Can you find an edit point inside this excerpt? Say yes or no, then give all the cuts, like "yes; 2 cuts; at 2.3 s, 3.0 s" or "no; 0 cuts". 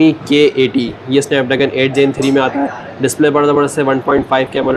no; 0 cuts